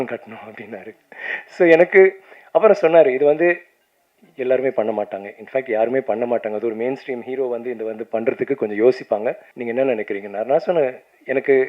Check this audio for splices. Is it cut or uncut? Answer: uncut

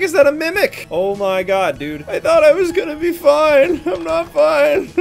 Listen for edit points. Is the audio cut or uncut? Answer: uncut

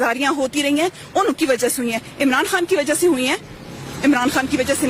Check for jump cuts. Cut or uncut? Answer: uncut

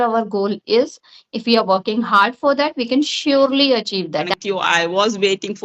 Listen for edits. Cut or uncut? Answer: cut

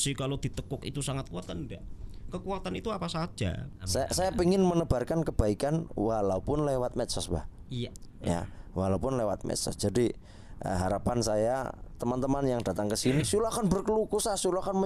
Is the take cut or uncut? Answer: cut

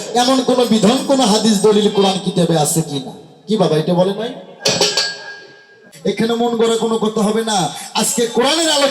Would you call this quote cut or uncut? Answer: cut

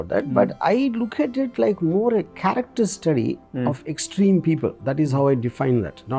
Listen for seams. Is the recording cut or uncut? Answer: uncut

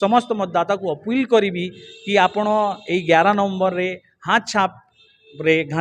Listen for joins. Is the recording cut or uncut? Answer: uncut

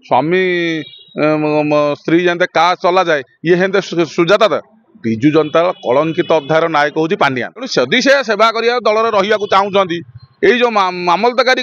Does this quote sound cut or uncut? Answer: cut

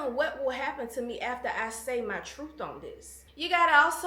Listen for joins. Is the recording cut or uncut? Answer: uncut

